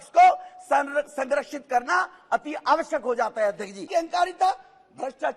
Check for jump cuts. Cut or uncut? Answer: cut